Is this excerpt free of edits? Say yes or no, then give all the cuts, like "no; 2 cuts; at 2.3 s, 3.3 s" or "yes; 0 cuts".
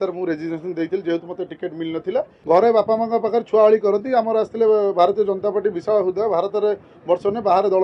no; 1 cut; at 2.3 s